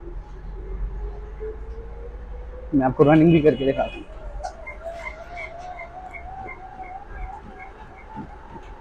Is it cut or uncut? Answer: uncut